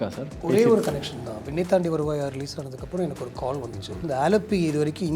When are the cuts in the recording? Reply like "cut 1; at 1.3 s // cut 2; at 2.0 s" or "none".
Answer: cut 1; at 4.0 s